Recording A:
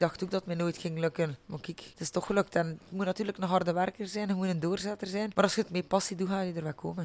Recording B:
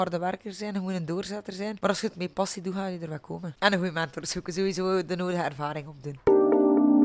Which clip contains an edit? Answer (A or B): B